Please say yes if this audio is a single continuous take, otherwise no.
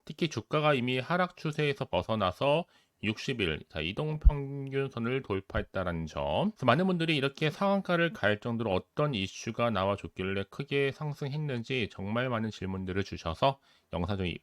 no